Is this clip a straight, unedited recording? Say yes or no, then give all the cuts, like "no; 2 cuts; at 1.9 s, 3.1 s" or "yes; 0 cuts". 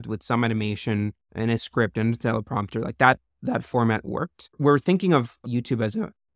no; 2 cuts; at 1.2 s, 4.6 s